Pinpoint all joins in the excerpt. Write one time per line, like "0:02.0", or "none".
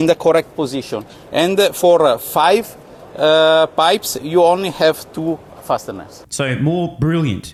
none